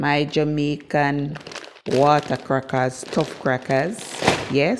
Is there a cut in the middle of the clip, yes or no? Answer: no